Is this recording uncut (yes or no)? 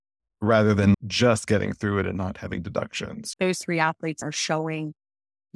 no